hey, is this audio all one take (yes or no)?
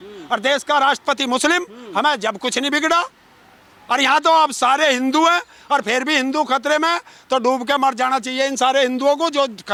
yes